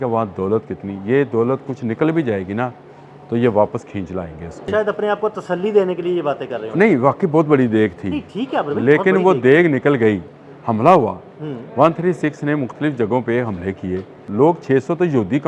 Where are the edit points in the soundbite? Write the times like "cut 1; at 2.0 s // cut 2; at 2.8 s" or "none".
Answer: cut 1; at 4.7 s // cut 2; at 10.3 s // cut 3; at 14.3 s